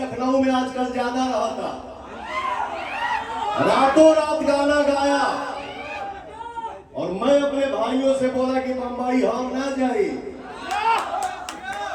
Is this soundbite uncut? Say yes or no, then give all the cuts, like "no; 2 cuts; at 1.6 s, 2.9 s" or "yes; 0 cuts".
yes; 0 cuts